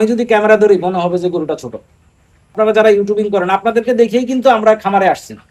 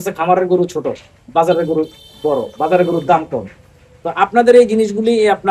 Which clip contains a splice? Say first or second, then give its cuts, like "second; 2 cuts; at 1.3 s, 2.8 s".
first; 1 cut; at 2.5 s